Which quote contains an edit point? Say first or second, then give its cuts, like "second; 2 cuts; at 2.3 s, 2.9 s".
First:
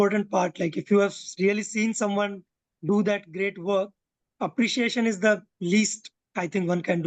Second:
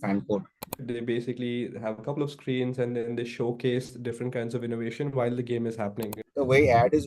second; 2 cuts; at 0.8 s, 6.2 s